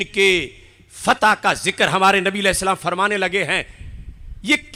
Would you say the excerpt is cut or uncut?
uncut